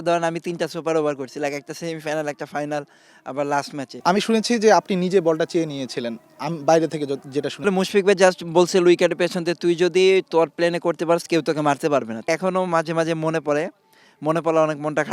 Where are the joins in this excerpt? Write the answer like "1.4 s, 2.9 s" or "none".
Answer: 3.9 s, 7.6 s, 12.3 s